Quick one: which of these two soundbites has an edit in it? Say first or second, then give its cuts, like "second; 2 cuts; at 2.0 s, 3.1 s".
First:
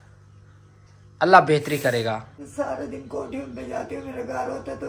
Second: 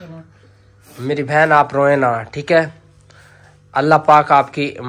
first; 1 cut; at 2.3 s